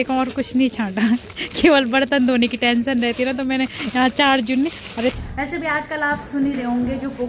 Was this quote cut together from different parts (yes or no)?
yes